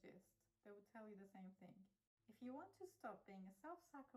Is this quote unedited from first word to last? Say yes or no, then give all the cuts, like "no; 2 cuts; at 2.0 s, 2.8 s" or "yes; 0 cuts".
no; 1 cut; at 2.0 s